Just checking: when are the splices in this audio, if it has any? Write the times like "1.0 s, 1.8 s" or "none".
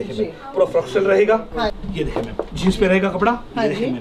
1.8 s